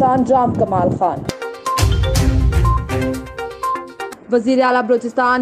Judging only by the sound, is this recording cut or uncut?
cut